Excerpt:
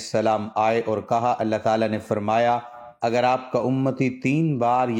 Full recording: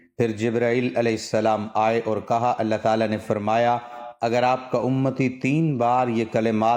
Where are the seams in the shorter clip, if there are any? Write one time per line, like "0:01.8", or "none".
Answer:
none